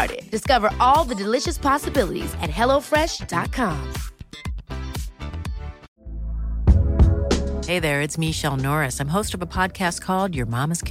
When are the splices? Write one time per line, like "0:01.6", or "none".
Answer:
0:05.9